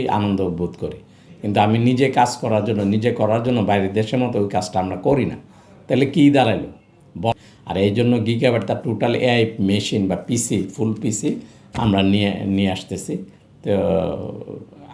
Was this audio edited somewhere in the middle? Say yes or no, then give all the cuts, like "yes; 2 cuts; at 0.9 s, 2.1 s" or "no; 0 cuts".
yes; 1 cut; at 7.3 s